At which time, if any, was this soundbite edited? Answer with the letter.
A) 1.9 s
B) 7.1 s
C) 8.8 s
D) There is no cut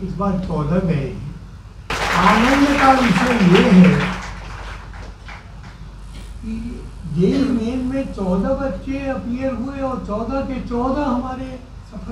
A